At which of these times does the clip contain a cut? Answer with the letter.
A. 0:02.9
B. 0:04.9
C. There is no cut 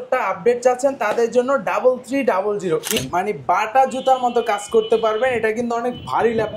A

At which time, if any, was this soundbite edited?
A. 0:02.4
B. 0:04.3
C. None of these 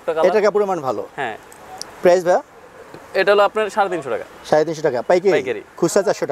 C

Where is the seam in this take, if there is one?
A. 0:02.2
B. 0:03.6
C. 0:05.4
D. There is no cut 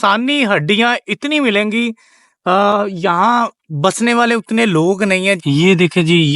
C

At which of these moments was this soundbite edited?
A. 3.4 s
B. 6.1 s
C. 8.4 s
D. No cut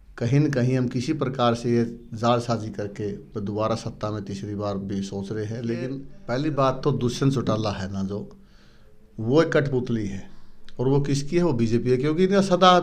B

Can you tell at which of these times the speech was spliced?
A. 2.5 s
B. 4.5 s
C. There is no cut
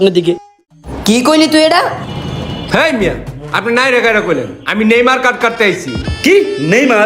A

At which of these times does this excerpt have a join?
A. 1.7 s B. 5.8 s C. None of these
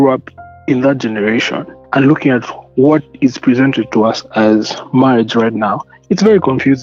A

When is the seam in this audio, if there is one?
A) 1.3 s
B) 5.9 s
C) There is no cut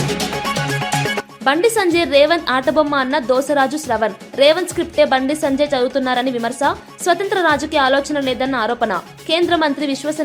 C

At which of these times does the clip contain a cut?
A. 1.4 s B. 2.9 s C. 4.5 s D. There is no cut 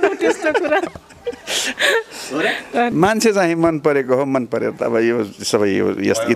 B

